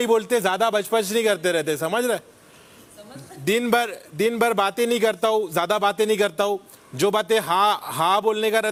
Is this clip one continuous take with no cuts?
yes; 0 cuts

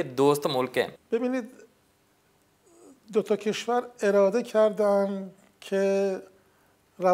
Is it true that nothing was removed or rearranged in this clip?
no; 1 cut; at 1.0 s

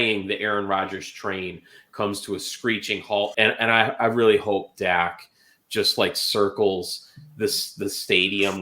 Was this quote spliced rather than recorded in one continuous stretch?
yes; 1 cut; at 3.3 s

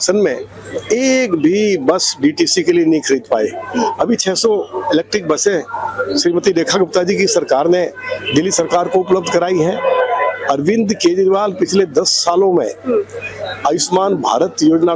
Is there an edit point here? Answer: no; 0 cuts

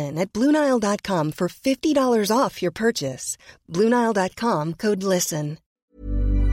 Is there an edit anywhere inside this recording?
yes; 1 cut; at 5.6 s

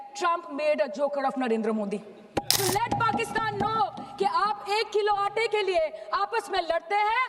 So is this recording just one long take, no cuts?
no; 1 cut; at 2.5 s

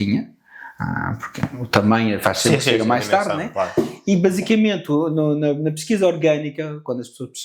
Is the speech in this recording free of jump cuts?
yes; 0 cuts

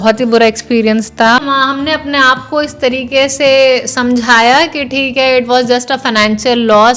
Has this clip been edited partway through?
no; 0 cuts

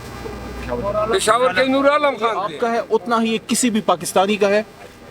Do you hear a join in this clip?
yes; 1 cut; at 2.5 s

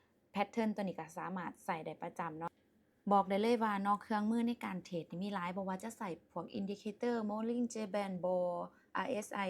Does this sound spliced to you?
yes; 1 cut; at 2.6 s

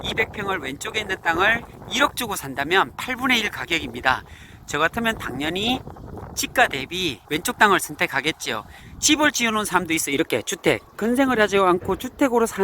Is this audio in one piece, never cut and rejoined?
no; 1 cut; at 8.8 s

